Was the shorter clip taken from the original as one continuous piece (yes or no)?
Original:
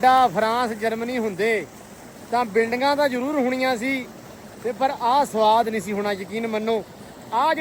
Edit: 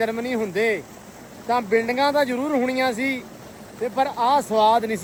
yes